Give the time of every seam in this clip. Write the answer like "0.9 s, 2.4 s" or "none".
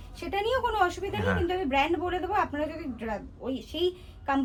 none